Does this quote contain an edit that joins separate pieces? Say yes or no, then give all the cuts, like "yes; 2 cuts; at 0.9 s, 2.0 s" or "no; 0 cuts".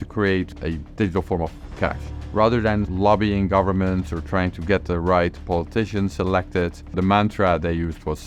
yes; 3 cuts; at 2.0 s, 2.9 s, 6.9 s